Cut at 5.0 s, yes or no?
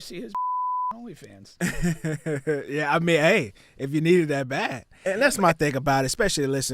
yes